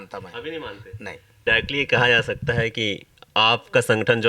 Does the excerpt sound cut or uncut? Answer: cut